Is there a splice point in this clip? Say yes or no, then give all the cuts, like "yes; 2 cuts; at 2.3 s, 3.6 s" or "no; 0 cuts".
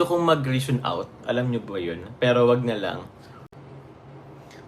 yes; 1 cut; at 3.5 s